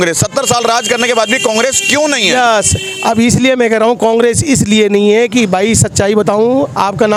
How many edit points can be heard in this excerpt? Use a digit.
0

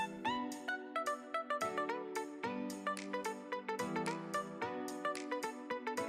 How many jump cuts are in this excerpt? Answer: 0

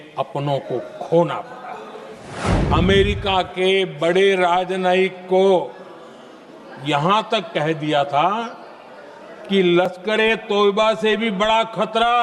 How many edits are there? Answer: 1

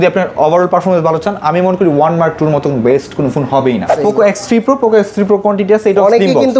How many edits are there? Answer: 1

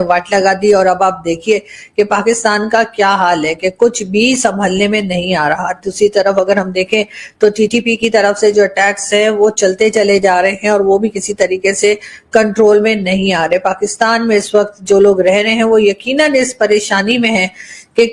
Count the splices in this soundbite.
0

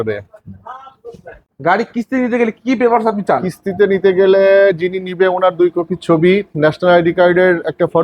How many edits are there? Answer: 1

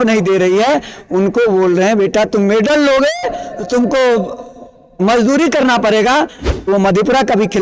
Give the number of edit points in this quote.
1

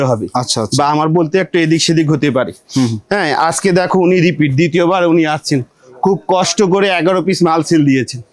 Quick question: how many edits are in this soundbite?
0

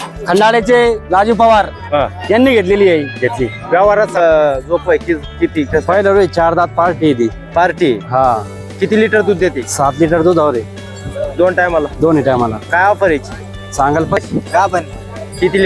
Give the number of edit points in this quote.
2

